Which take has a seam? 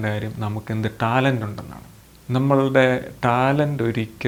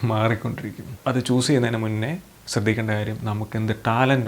second; 1 cut; at 0.9 s

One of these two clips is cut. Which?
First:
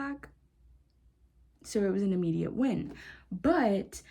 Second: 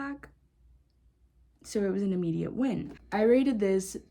second; 1 cut; at 3.0 s

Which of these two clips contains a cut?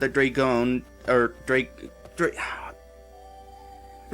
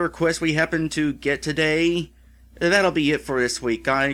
first; 1 cut; at 2.0 s

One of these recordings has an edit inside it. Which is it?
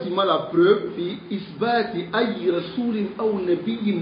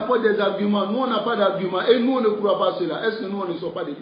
first; 1 cut; at 1.3 s

